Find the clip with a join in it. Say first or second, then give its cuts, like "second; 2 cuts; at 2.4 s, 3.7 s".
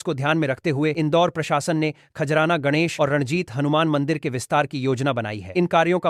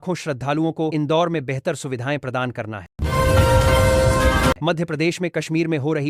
second; 2 cuts; at 2.8 s, 4.6 s